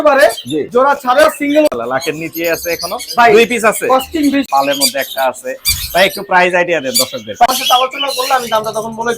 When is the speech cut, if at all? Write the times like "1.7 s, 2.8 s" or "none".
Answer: 1.7 s, 4.5 s, 7.5 s